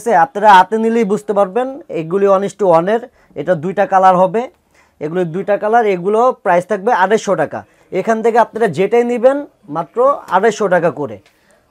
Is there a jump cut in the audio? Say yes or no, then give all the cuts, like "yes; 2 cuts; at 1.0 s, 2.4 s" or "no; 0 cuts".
no; 0 cuts